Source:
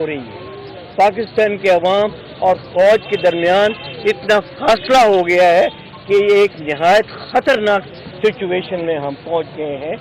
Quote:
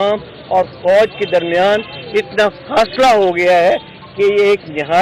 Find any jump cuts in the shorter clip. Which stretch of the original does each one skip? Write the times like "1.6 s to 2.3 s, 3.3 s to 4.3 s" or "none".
none